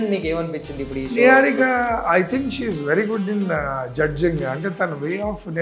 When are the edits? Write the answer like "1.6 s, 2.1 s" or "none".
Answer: none